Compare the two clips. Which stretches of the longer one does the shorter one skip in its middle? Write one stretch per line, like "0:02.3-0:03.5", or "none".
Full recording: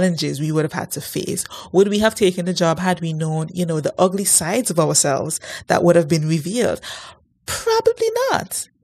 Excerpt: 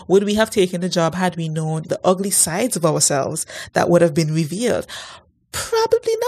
0:03.5-0:03.8